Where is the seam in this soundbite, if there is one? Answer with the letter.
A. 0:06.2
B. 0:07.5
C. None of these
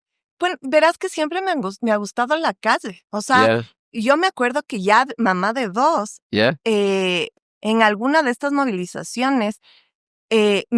C